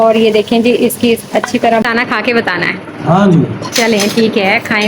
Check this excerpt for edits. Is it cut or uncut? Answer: cut